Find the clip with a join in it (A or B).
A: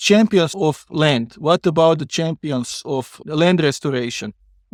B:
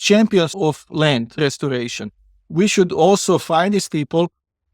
B